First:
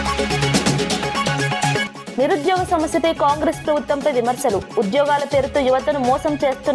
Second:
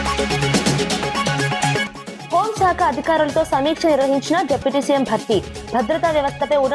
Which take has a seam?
first; 1 cut; at 2.0 s

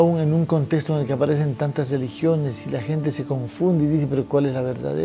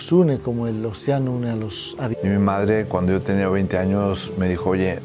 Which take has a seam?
second; 1 cut; at 2.1 s

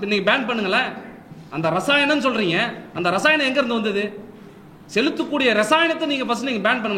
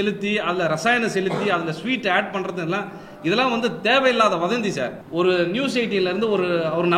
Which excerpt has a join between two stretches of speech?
second; 1 cut; at 5.0 s

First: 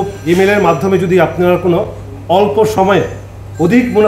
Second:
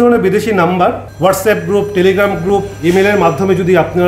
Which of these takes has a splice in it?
second; 1 cut; at 1.1 s

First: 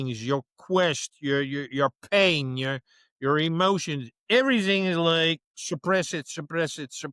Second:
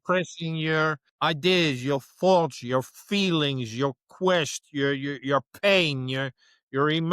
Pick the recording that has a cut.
second; 1 cut; at 1.1 s

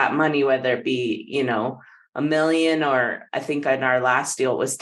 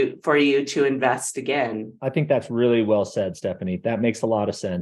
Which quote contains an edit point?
second; 1 cut; at 2.0 s

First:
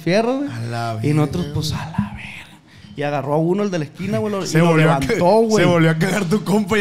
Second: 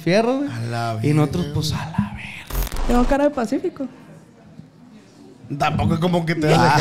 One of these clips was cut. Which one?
second; 1 cut; at 2.7 s

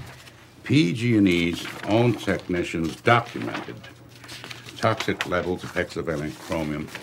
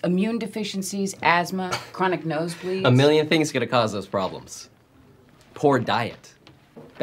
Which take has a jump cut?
second; 1 cut; at 1.8 s

